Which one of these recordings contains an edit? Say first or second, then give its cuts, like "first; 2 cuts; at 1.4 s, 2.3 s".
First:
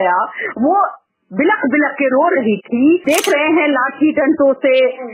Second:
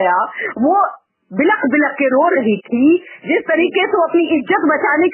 first; 1 cut; at 3.0 s